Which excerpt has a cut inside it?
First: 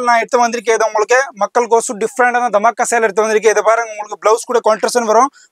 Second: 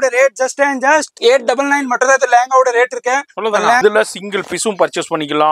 second; 2 cuts; at 1.1 s, 3.8 s

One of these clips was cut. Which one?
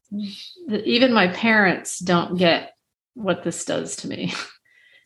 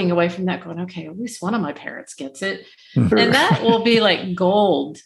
second; 1 cut; at 3.1 s

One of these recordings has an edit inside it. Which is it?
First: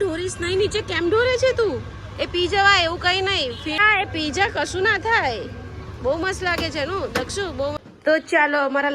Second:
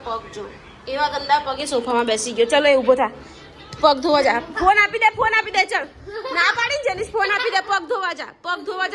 first; 2 cuts; at 3.8 s, 7.8 s

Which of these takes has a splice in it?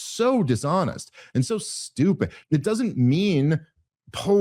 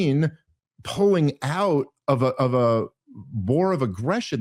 first; 1 cut; at 2.3 s

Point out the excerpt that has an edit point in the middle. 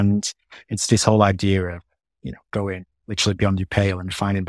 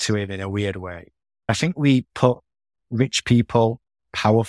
second; 1 cut; at 1.5 s

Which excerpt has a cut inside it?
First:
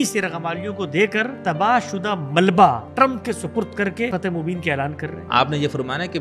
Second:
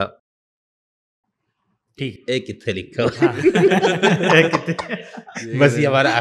first; 4 cuts; at 1.4 s, 2.9 s, 4.1 s, 5.2 s

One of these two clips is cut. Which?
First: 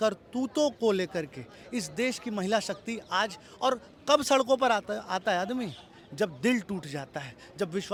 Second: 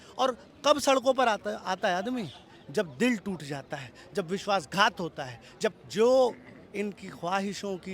second; 1 cut; at 5.8 s

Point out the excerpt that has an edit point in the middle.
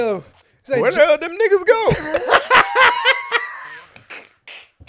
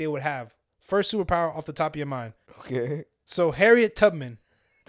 second; 1 cut; at 2.9 s

